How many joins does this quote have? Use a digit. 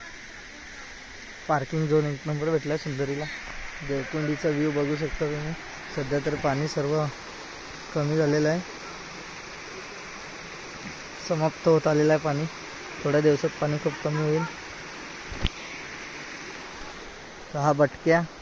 0